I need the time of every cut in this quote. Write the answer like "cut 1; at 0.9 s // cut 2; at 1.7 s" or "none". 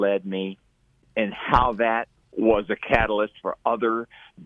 cut 1; at 1.1 s // cut 2; at 2.3 s